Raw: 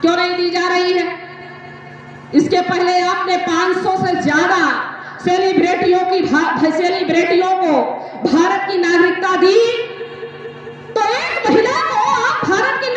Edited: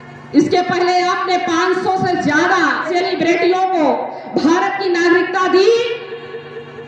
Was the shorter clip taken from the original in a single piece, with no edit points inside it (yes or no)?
no